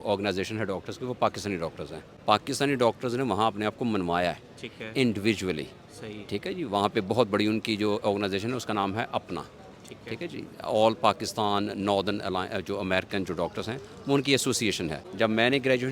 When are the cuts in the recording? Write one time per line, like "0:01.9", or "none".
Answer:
0:02.2
0:15.0